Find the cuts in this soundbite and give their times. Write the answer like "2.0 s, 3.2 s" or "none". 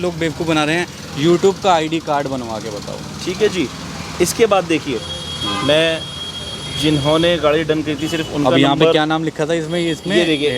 none